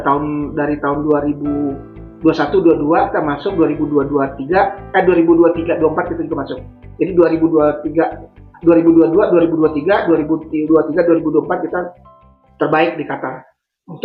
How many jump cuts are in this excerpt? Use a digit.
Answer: 0